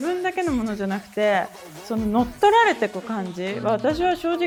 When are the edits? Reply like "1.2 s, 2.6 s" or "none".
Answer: none

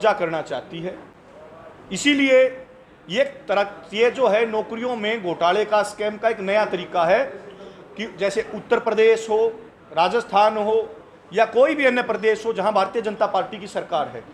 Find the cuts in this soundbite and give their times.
none

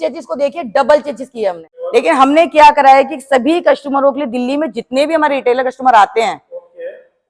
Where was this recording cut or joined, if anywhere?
1.7 s

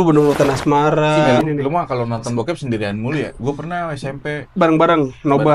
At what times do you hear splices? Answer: 1.4 s

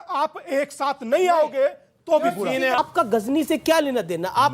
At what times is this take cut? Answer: 2.8 s

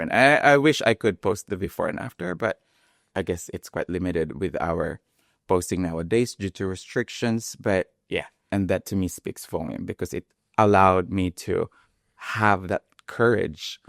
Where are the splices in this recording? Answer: 8.4 s

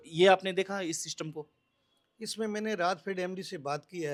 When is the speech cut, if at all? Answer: none

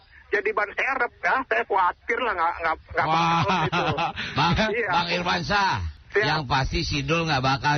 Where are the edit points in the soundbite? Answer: 5.9 s

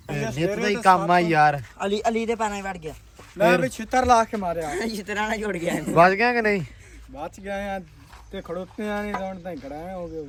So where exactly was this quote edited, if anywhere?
none

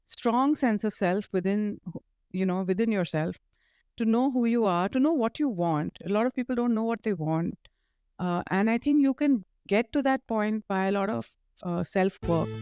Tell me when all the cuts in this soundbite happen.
none

